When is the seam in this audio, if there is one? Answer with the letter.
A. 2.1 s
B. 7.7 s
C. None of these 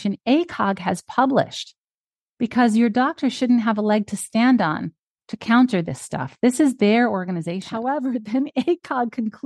B